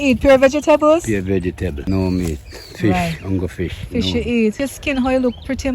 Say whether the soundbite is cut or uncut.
cut